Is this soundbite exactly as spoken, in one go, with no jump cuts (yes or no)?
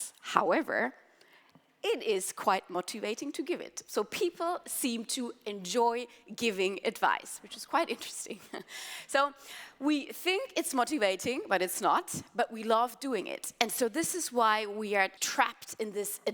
no